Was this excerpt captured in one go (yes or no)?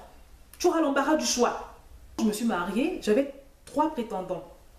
no